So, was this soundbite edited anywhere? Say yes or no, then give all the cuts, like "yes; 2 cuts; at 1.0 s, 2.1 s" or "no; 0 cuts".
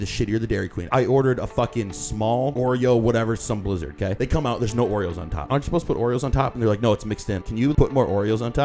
yes; 5 cuts; at 0.9 s, 2.5 s, 4.1 s, 5.5 s, 7.7 s